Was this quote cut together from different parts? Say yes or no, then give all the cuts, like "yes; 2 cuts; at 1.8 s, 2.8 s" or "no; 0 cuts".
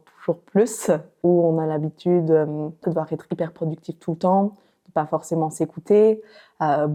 no; 0 cuts